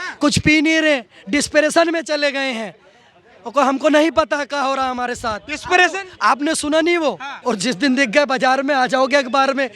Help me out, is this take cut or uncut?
cut